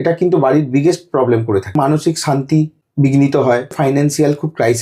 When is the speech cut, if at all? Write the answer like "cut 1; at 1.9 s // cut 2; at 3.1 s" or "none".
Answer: cut 1; at 1.8 s // cut 2; at 2.8 s // cut 3; at 3.8 s